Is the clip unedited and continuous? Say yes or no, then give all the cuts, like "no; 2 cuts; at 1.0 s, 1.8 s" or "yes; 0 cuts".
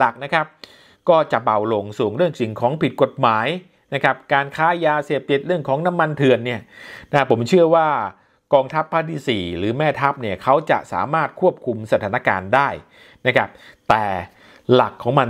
yes; 0 cuts